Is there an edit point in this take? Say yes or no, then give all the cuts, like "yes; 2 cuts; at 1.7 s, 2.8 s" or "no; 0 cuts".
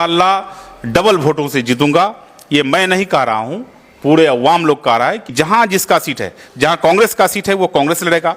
yes; 1 cut; at 5.3 s